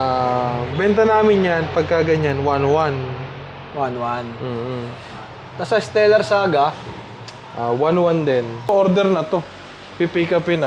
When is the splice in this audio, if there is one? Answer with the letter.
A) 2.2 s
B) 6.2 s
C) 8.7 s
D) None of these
C